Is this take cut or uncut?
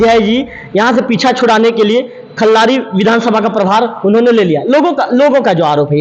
uncut